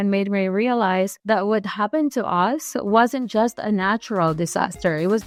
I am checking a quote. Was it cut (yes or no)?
no